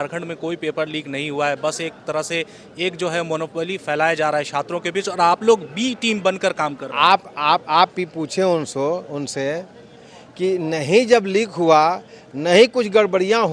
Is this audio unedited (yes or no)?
yes